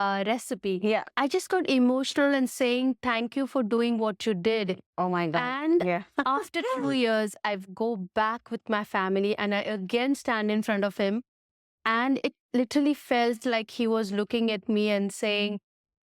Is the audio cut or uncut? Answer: cut